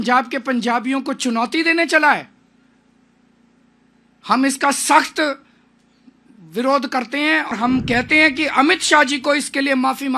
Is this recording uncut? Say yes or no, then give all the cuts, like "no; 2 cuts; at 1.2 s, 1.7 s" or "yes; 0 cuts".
no; 1 cut; at 7.5 s